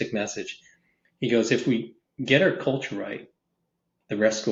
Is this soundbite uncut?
yes; 0 cuts

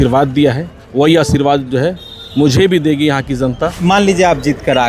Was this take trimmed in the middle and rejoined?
yes; 1 cut; at 3.8 s

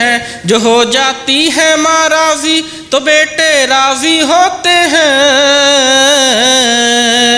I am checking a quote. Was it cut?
no; 0 cuts

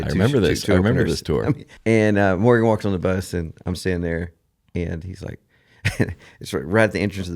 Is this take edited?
yes; 1 cut; at 1.7 s

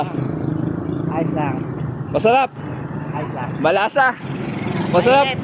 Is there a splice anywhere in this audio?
no; 0 cuts

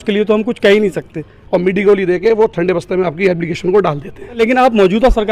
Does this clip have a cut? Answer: yes; 2 cuts; at 1.4 s, 4.4 s

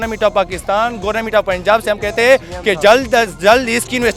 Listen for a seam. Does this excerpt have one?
no; 0 cuts

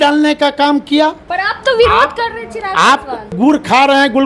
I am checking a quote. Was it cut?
yes; 2 cuts; at 1.2 s, 3.3 s

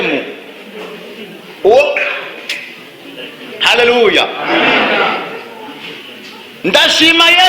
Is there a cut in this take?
no; 0 cuts

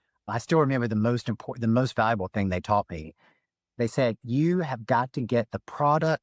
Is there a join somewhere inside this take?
no; 0 cuts

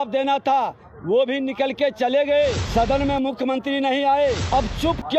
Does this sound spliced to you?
yes; 2 cuts; at 2.6 s, 4.4 s

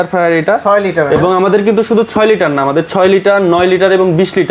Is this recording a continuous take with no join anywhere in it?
yes; 0 cuts

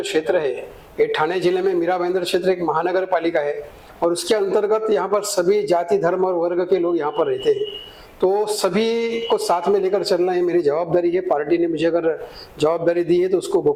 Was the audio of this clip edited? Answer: no; 0 cuts

